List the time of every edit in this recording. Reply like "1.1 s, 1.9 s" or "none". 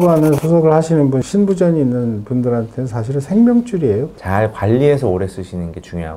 4.1 s